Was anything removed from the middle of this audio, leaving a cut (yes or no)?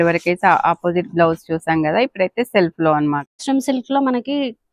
yes